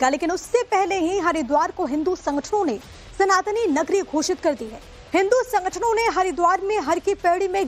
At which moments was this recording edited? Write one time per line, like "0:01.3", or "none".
0:03.5